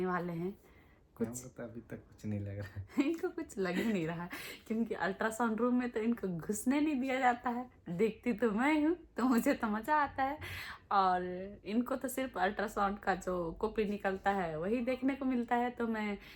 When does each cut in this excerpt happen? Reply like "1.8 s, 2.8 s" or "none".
none